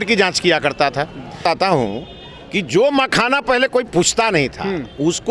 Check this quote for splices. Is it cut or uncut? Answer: cut